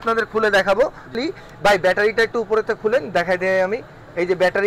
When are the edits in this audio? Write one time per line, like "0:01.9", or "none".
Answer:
0:01.1